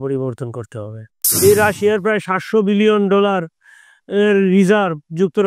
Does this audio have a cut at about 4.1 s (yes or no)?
no